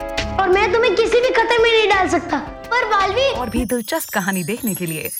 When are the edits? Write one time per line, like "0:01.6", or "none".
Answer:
0:03.5